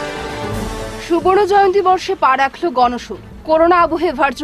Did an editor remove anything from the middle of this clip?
yes; 1 cut; at 0.9 s

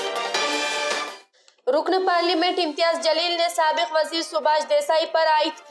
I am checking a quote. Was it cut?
yes; 1 cut; at 1.3 s

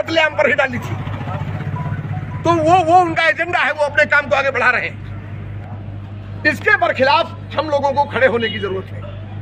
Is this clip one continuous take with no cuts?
yes; 0 cuts

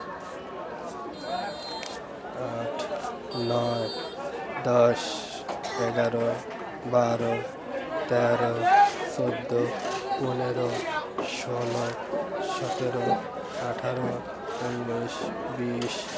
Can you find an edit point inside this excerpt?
no; 0 cuts

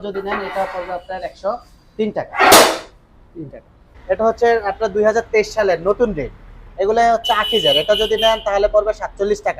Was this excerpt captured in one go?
no; 1 cut; at 3.9 s

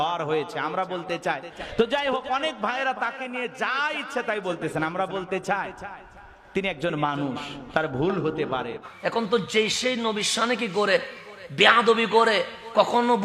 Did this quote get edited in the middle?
yes; 2 cuts; at 1.5 s, 8.8 s

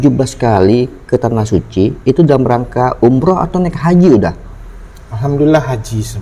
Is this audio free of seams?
yes; 0 cuts

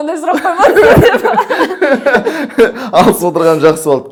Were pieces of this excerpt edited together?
no; 0 cuts

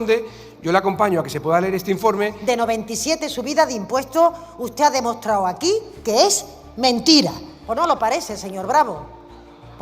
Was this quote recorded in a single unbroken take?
no; 2 cuts; at 2.4 s, 7.5 s

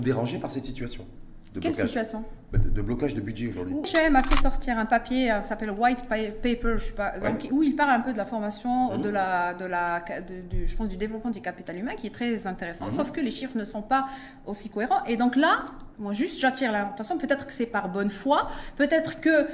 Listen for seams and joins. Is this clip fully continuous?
no; 1 cut; at 3.9 s

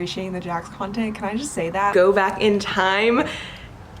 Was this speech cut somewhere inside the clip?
yes; 1 cut; at 1.9 s

